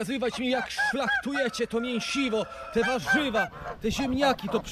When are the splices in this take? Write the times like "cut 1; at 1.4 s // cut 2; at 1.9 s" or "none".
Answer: none